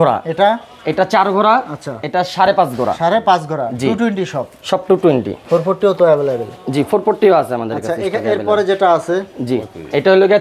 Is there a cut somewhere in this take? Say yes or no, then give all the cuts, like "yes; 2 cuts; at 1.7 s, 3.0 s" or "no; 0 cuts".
no; 0 cuts